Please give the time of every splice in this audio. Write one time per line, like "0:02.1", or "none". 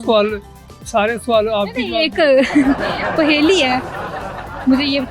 none